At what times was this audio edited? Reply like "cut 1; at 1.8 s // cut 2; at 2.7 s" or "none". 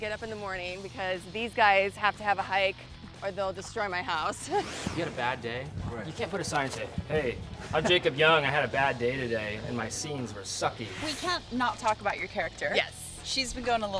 cut 1; at 4.9 s // cut 2; at 11.0 s